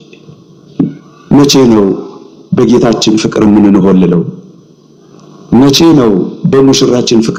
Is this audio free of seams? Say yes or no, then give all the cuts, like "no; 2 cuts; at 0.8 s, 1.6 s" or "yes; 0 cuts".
yes; 0 cuts